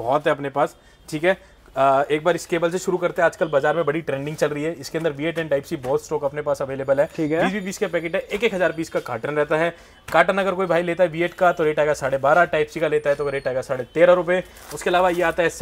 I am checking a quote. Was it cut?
no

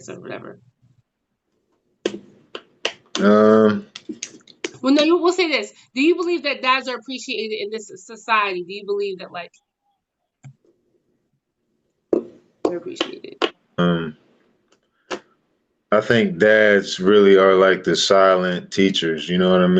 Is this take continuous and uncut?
no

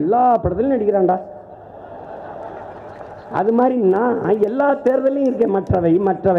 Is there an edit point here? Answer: no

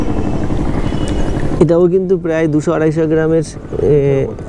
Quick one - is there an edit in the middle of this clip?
no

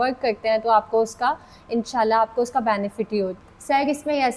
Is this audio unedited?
no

